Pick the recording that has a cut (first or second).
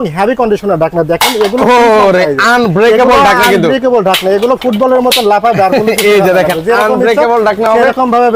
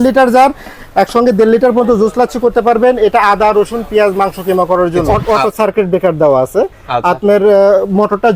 second